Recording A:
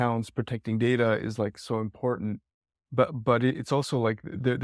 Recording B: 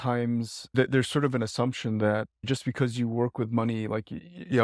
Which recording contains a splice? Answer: B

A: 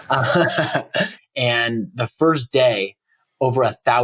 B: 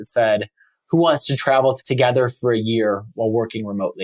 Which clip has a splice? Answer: A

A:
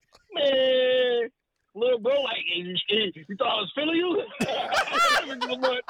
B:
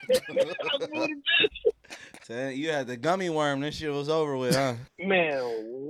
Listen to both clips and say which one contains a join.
B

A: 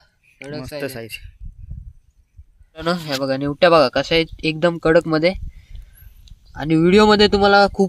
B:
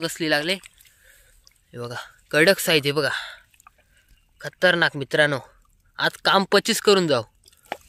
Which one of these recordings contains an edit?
A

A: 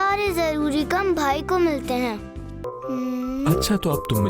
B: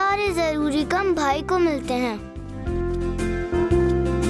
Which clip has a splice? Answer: A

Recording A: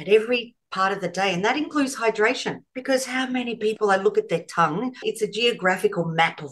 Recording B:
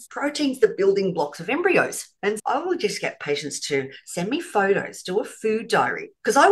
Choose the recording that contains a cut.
A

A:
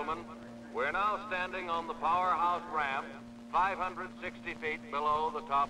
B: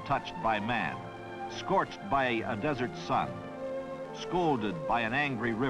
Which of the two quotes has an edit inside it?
A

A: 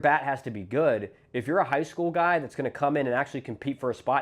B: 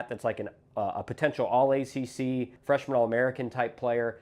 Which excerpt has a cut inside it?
B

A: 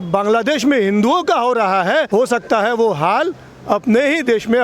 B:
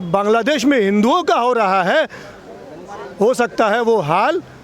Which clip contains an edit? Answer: A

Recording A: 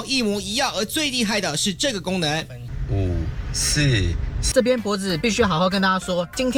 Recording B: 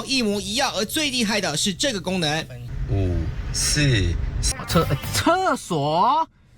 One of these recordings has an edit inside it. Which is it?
B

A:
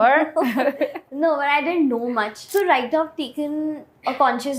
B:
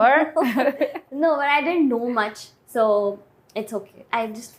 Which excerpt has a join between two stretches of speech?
A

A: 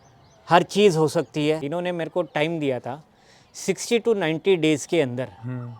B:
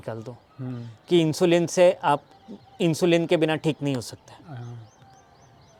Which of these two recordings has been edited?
A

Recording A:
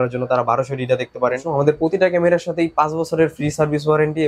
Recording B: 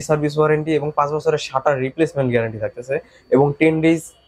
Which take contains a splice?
A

